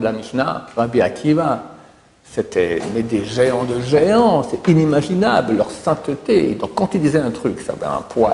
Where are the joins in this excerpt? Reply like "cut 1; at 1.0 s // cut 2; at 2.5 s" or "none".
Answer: none